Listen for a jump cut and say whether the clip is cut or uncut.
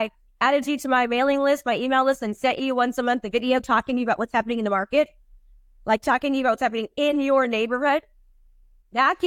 uncut